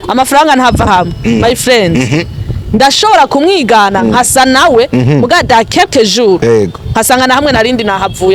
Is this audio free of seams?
yes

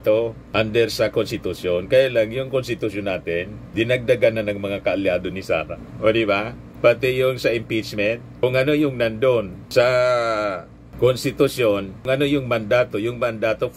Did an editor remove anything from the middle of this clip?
yes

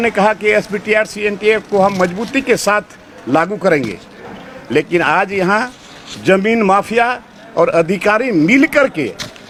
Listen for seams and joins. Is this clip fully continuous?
yes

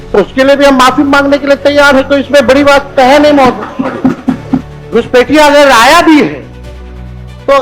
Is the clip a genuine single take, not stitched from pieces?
no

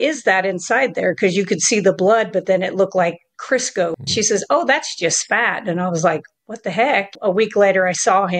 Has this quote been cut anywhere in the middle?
yes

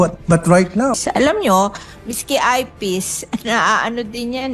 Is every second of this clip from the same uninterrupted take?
no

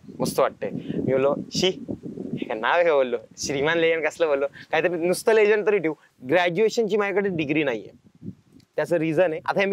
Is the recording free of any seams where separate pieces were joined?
no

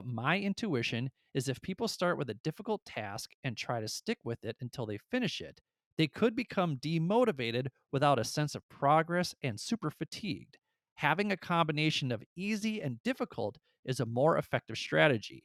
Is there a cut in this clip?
no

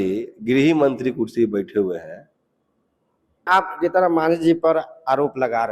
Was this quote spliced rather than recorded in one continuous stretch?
yes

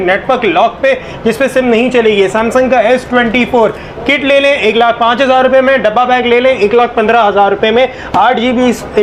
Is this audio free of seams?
yes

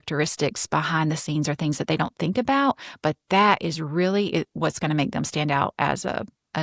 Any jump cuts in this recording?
no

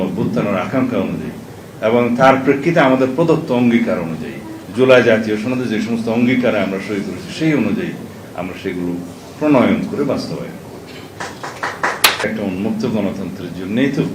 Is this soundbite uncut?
no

